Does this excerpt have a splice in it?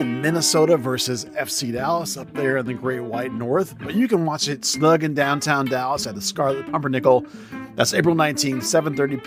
no; 0 cuts

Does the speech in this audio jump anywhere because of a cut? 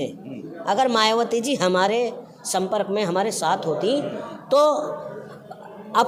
no; 0 cuts

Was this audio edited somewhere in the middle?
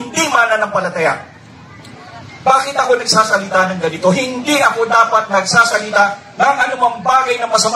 no; 0 cuts

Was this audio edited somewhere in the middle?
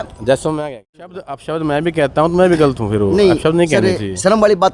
yes; 1 cut; at 1.2 s

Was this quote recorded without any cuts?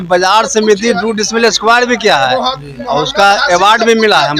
yes; 0 cuts

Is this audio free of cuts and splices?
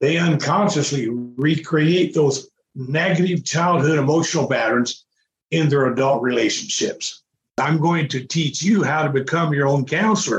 no; 1 cut; at 7.5 s

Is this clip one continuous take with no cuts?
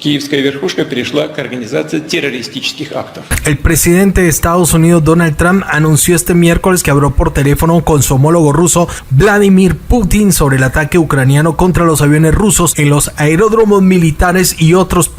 no; 1 cut; at 3.3 s

